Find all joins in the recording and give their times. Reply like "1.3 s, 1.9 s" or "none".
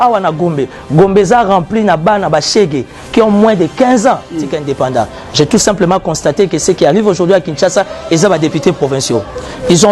4.6 s